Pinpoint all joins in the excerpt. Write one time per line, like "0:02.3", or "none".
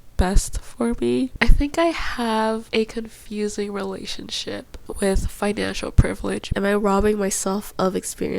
0:01.3
0:02.7
0:06.5